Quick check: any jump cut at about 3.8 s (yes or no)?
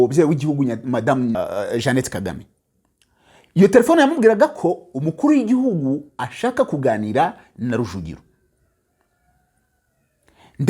no